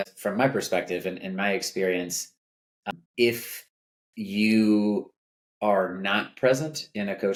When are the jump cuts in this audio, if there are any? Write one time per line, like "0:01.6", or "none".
none